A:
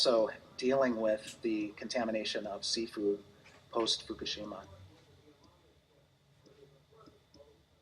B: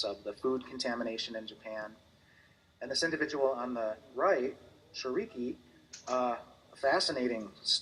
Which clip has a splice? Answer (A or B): A